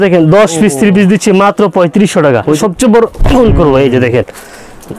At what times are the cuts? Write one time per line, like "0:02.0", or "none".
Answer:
0:02.6